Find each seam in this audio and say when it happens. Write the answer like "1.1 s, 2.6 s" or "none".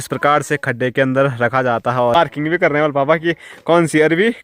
2.2 s